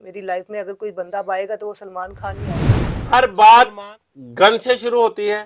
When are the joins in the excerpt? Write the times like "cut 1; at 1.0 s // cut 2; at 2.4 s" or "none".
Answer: cut 1; at 2.6 s

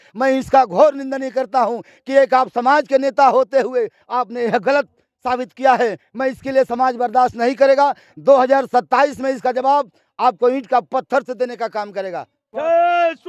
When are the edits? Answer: cut 1; at 12.4 s

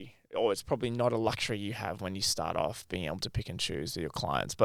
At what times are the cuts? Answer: none

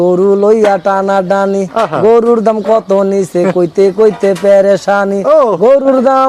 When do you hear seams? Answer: none

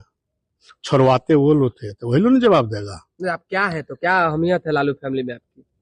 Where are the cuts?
none

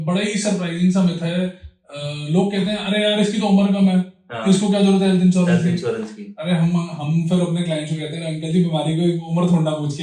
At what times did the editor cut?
none

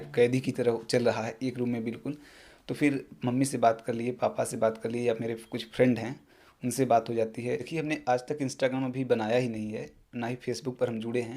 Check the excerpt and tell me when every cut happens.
cut 1; at 7.7 s

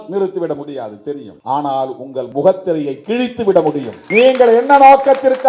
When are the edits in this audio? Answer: cut 1; at 1.3 s // cut 2; at 2.3 s // cut 3; at 4.0 s

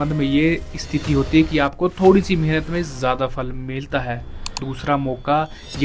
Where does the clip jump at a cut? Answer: cut 1; at 4.7 s

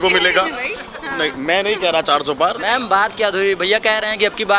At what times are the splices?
cut 1; at 2.6 s

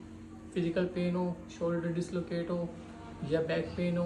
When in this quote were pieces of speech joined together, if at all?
none

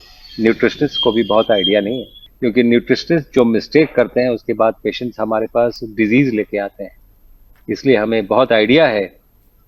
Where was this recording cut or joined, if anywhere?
none

